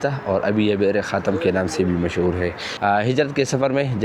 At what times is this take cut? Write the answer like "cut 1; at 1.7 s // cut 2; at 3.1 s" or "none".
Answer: cut 1; at 2.7 s